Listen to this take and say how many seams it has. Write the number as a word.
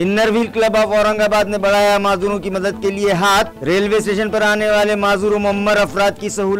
zero